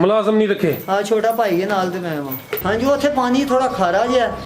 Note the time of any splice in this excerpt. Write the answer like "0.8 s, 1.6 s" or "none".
2.6 s